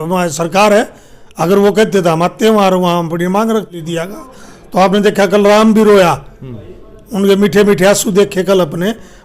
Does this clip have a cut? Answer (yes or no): yes